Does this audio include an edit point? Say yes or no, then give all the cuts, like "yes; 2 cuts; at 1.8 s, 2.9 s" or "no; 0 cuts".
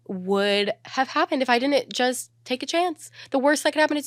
no; 0 cuts